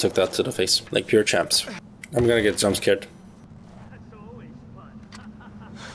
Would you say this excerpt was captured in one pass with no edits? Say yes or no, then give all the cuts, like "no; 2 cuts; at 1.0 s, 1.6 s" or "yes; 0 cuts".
yes; 0 cuts